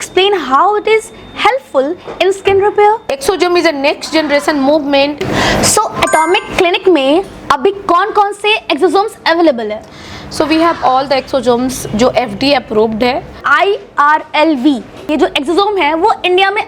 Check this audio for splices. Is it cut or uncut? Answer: cut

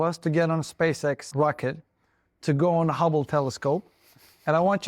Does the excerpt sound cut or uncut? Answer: cut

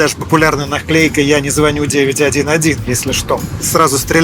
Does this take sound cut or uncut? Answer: uncut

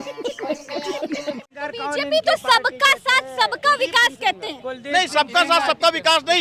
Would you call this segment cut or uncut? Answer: cut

